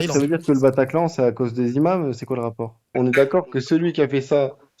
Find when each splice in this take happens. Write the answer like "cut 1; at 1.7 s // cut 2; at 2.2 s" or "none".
cut 1; at 2.9 s